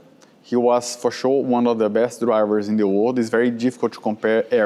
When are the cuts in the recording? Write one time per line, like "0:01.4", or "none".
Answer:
none